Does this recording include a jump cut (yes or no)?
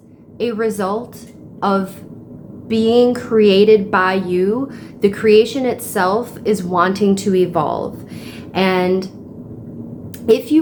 no